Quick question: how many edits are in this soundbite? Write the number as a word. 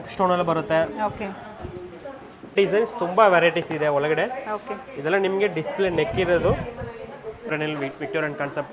two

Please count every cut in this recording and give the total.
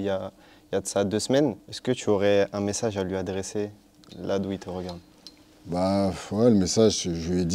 one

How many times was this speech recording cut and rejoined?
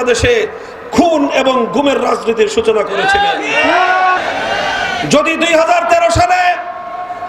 one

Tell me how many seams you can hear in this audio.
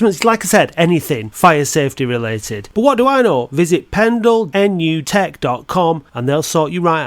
one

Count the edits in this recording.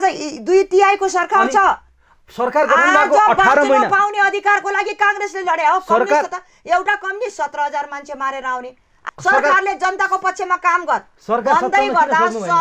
one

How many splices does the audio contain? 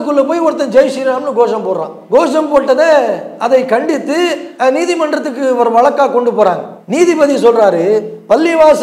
zero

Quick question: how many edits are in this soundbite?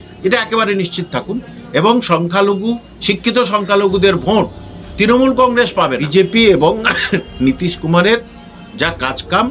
one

